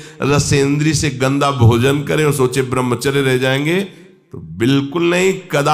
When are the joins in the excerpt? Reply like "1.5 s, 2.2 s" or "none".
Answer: none

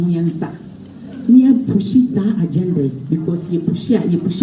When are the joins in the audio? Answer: none

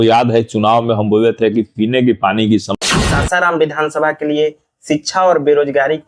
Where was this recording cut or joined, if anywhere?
2.7 s

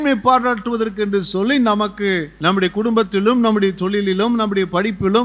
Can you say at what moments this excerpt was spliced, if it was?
2.3 s

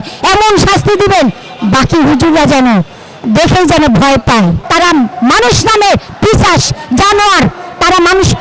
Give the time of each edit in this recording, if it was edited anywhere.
4.6 s

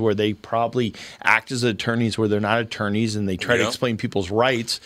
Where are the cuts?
none

